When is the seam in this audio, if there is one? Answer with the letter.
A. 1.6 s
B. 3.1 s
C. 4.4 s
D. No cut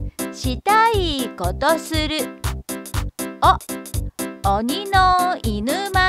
C